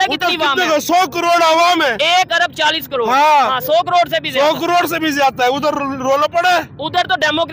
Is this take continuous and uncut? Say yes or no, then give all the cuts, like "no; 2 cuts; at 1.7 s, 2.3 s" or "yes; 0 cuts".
yes; 0 cuts